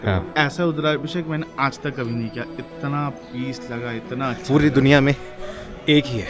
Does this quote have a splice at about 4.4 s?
yes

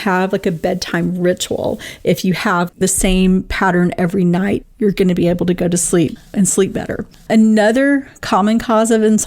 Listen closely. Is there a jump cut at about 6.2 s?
yes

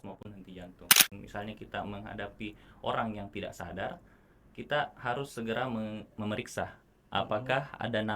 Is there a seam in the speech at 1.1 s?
yes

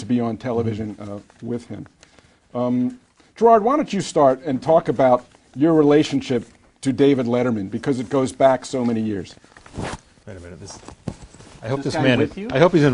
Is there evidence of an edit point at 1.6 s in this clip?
yes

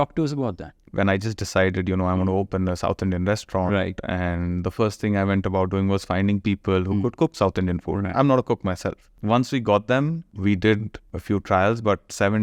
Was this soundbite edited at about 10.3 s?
yes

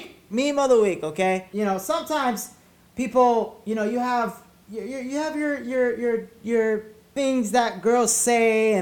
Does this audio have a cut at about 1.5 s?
yes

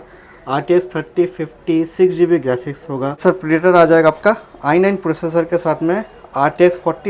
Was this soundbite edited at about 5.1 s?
no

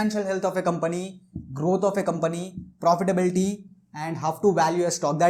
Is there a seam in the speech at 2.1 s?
no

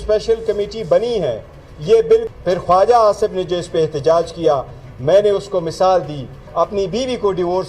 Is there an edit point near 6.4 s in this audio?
yes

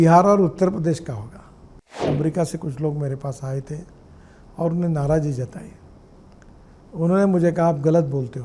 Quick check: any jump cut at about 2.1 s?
yes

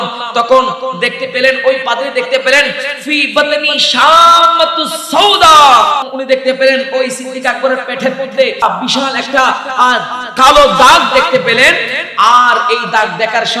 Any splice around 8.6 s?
yes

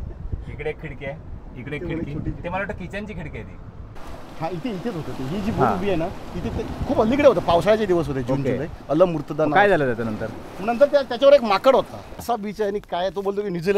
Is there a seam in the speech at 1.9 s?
no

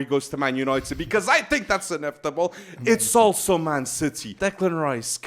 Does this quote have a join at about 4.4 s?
yes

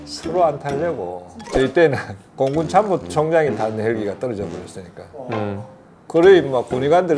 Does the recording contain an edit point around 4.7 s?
no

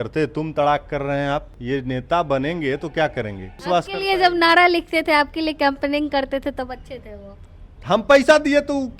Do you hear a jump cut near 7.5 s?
no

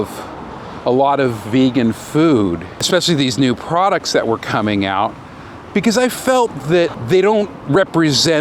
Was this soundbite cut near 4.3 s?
no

